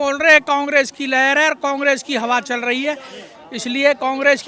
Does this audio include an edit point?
no; 0 cuts

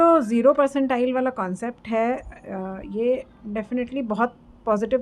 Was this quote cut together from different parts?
no; 0 cuts

